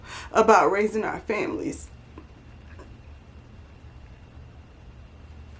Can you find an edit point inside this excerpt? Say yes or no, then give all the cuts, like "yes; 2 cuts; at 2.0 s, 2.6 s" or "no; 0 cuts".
no; 0 cuts